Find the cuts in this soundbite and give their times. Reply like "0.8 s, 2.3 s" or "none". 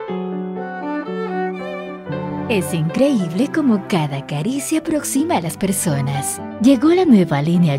none